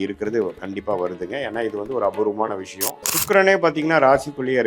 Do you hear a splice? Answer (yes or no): yes